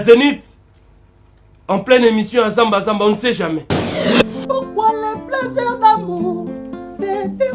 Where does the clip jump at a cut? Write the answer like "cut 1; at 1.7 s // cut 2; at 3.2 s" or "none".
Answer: cut 1; at 3.9 s